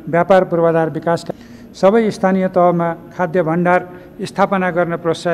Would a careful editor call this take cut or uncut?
cut